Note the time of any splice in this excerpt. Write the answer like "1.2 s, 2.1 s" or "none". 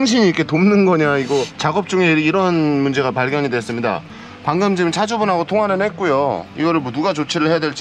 none